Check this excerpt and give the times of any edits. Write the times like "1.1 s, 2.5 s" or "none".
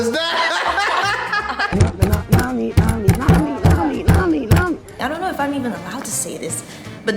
1.7 s, 4.9 s